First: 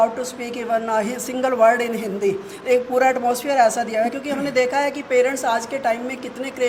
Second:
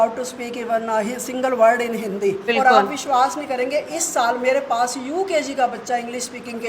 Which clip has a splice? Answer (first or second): second